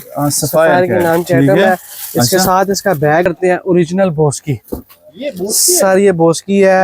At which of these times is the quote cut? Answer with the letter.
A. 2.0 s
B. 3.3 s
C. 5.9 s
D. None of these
B